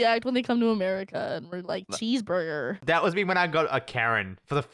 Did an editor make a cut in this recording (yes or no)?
yes